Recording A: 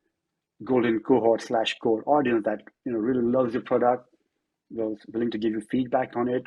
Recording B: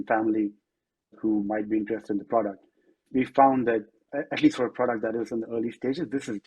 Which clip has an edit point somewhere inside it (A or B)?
B